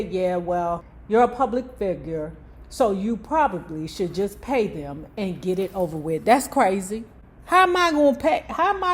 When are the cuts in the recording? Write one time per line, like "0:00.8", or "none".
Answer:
0:00.9